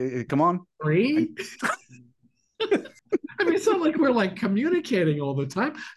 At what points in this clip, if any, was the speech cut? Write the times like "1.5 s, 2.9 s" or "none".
3.0 s